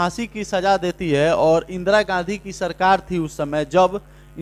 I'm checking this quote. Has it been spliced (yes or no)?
no